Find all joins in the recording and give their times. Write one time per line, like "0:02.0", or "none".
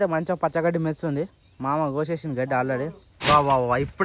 0:03.1